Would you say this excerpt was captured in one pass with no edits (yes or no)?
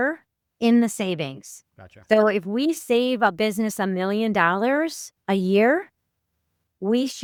yes